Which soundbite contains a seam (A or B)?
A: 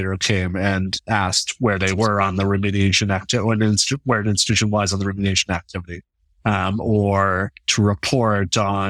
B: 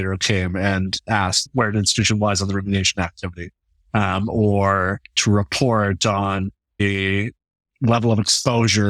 B